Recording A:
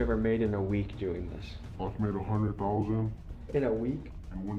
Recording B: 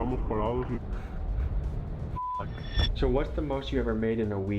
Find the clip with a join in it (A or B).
B